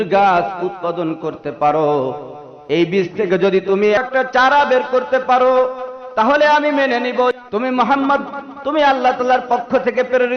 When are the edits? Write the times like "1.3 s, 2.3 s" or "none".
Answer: 4.0 s, 7.3 s